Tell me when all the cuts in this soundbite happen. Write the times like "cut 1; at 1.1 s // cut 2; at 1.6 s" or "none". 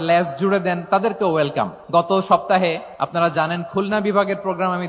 cut 1; at 1.8 s // cut 2; at 2.9 s